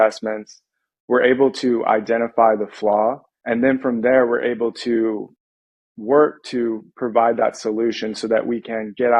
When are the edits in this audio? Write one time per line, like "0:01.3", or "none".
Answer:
0:03.3